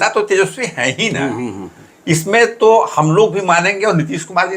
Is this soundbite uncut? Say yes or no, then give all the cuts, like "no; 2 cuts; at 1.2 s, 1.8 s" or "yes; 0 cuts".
yes; 0 cuts